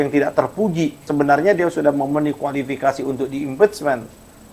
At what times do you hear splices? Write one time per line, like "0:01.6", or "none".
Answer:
0:01.1